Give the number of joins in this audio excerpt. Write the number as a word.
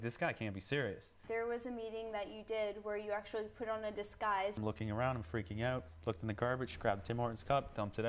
two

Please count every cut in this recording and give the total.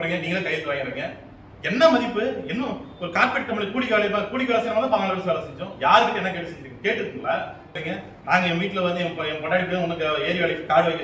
one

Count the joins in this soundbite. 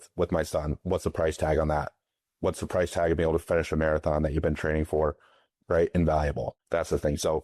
two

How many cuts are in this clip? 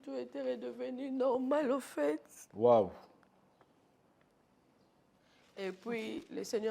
one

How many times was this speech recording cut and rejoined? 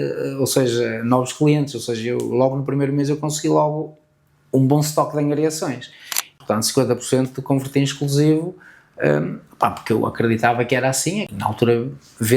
two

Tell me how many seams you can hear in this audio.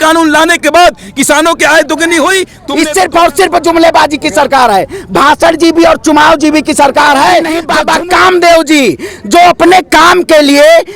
two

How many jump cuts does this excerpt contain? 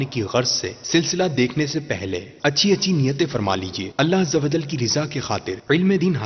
zero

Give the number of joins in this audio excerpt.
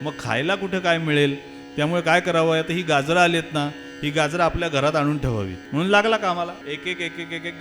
two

